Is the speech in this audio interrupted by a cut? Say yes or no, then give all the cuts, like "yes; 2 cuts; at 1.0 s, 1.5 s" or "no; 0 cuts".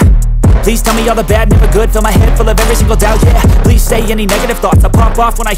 no; 0 cuts